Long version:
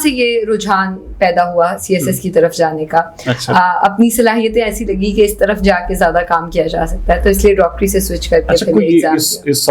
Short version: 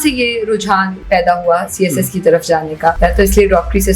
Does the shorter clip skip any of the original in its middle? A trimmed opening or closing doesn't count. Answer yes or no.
yes